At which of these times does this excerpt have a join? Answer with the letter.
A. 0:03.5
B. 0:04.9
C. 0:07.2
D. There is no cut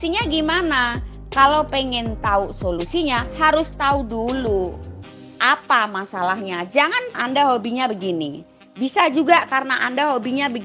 C